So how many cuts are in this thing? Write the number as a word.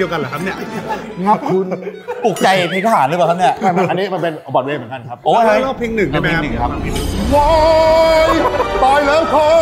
zero